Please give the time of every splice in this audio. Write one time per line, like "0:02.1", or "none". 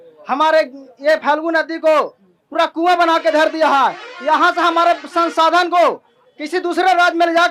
none